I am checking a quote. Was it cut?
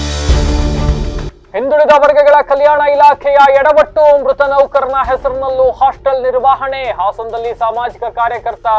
yes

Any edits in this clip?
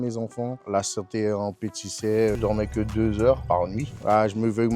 yes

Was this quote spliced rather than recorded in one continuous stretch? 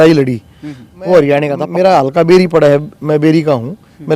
yes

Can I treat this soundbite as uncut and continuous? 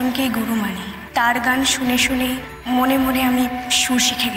no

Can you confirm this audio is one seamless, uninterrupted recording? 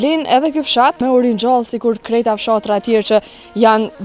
no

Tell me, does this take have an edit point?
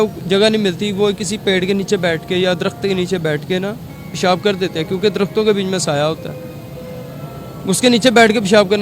no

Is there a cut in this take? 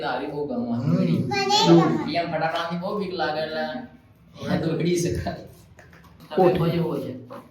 yes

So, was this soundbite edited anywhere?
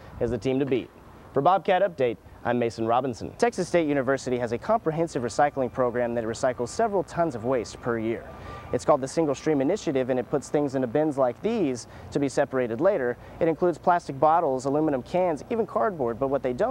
yes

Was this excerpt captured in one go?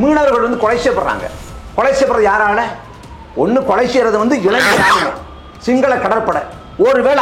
yes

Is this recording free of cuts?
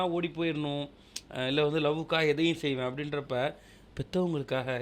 yes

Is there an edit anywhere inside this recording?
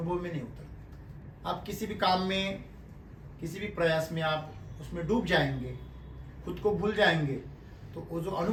no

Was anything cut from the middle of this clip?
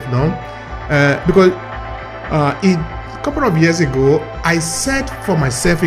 yes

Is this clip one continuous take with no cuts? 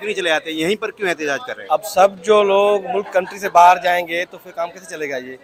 yes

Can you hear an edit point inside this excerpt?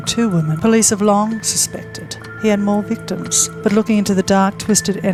no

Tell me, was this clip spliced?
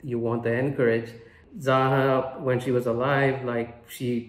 yes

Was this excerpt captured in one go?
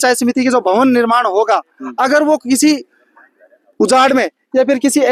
yes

